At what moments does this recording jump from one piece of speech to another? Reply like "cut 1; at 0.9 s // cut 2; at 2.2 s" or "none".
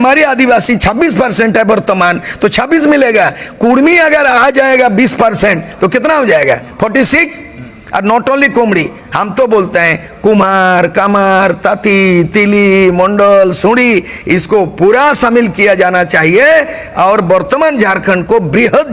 none